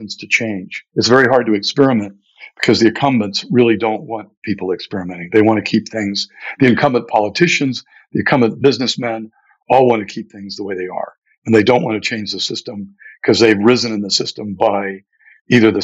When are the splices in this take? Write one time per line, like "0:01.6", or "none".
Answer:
none